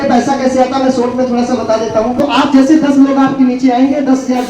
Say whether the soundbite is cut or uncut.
cut